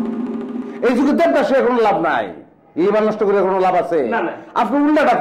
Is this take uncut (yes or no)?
yes